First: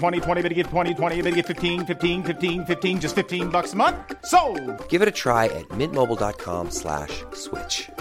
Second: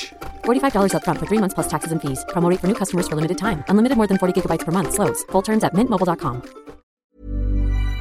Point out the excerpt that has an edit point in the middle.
second; 1 cut; at 7.0 s

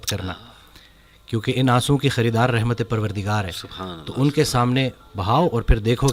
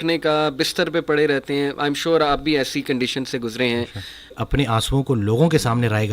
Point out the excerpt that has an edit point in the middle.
second; 1 cut; at 4.4 s

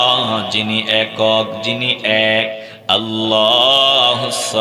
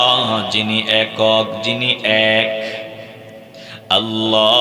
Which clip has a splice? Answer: first; 1 cut; at 2.7 s

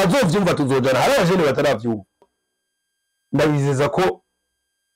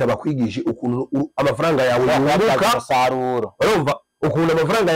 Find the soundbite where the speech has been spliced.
first; 1 cut; at 2.3 s

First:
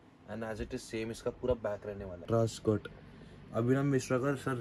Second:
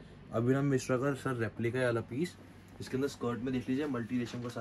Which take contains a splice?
first; 1 cut; at 2.3 s

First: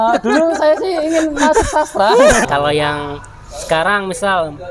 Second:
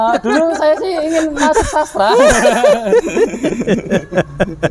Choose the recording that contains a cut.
first; 1 cut; at 2.4 s

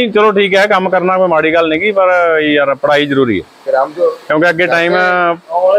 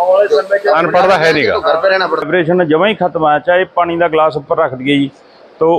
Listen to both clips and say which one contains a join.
second; 1 cut; at 2.2 s

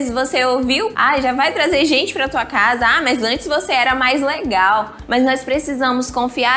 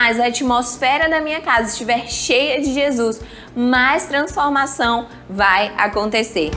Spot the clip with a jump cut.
first; 2 cuts; at 0.9 s, 5.0 s

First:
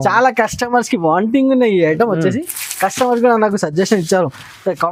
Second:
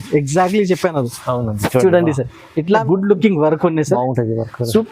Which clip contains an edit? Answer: second; 1 cut; at 2.8 s

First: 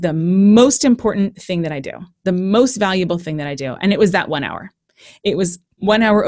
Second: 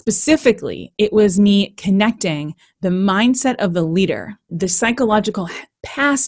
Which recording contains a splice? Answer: second; 1 cut; at 4.5 s

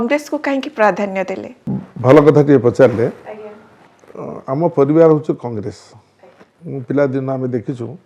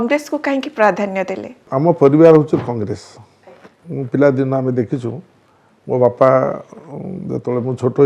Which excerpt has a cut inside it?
second; 1 cut; at 1.6 s

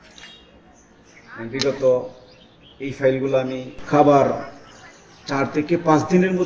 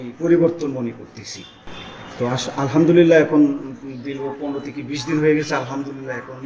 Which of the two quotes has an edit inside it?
first; 1 cut; at 3.7 s

